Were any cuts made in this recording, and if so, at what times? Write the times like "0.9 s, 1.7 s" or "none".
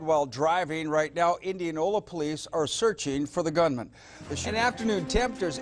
3.9 s